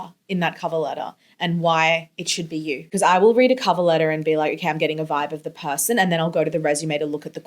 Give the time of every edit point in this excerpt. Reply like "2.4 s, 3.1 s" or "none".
2.9 s